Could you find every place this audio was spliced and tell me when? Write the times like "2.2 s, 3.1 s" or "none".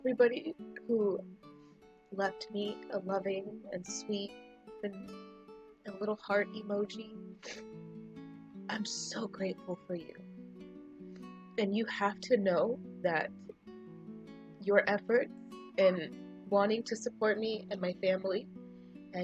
13.3 s, 14.6 s